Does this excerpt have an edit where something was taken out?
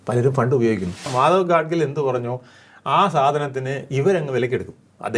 yes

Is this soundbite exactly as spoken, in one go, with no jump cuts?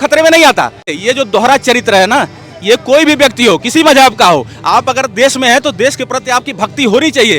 no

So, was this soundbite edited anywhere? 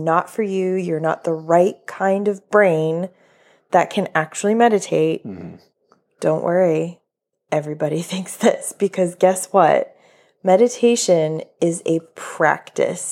no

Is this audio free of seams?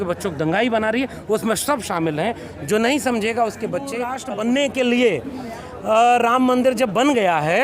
no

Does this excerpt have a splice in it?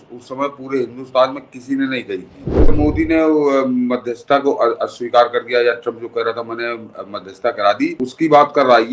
yes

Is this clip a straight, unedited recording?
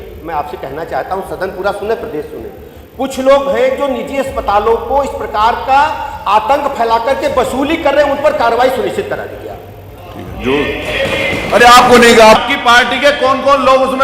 no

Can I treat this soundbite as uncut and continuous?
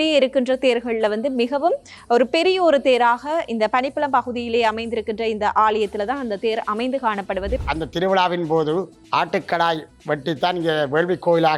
no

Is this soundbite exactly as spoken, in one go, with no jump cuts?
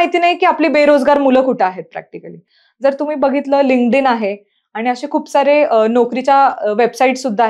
yes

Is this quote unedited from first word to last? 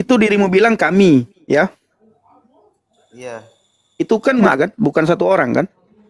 no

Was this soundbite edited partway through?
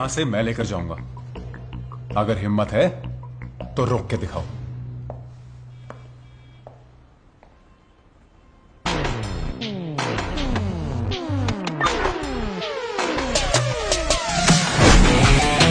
yes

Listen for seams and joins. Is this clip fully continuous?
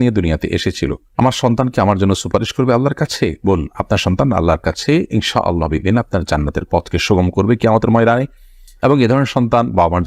yes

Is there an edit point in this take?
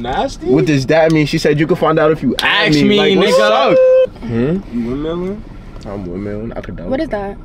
yes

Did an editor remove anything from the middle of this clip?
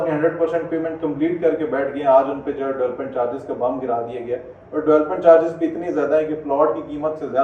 no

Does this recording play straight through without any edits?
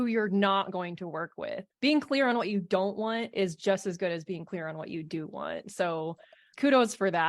no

